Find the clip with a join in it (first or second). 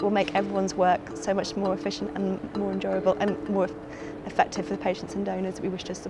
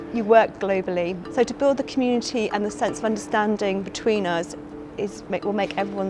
second